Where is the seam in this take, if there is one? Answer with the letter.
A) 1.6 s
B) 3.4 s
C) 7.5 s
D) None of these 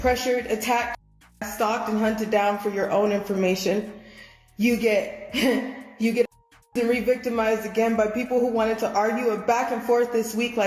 D